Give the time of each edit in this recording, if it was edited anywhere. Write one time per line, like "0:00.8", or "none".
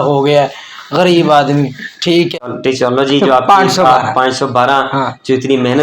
0:02.5